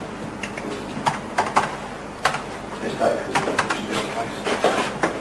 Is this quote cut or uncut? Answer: cut